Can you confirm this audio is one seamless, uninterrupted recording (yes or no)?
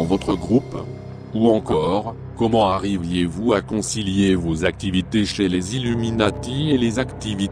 no